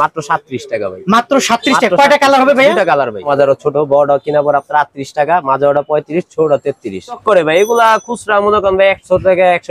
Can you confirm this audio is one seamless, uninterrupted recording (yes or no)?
no